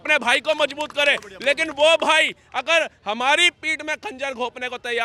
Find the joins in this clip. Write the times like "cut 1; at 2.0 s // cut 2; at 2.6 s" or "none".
none